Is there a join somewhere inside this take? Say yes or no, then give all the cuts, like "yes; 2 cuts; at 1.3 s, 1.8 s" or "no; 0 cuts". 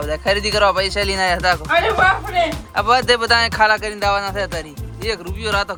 no; 0 cuts